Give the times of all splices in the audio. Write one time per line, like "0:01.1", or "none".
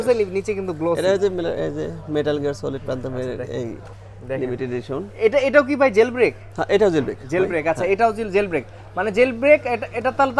none